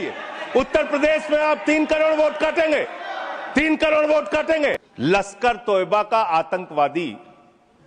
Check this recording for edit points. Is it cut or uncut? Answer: cut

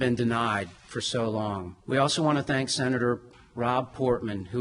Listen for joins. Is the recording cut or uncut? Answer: uncut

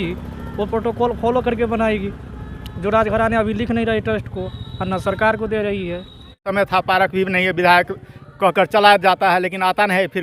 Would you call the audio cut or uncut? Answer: cut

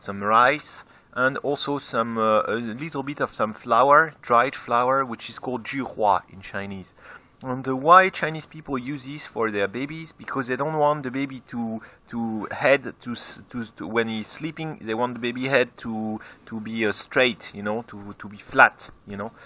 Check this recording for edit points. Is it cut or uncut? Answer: cut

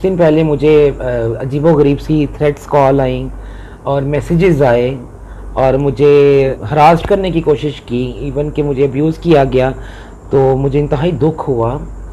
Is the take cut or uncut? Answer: uncut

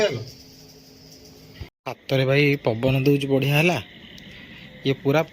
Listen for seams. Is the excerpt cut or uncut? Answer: cut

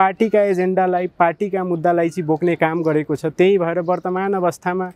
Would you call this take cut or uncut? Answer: uncut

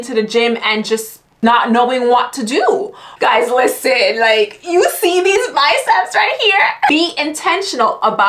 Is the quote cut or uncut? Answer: cut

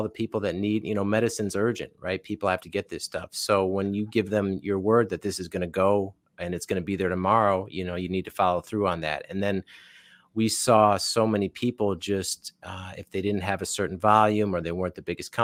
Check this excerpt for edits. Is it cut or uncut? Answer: uncut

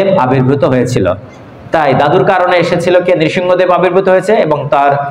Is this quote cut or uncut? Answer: uncut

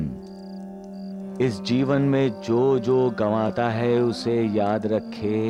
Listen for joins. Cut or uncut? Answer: uncut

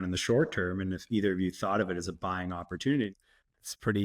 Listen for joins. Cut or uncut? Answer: cut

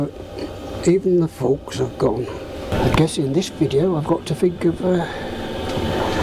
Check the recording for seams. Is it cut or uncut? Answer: cut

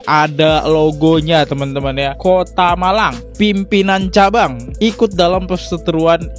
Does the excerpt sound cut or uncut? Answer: uncut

